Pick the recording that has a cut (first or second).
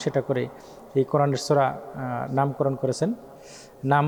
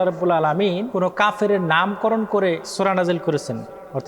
second